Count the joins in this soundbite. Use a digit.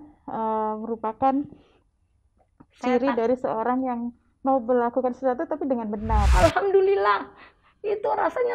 1